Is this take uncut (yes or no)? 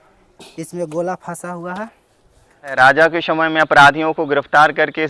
no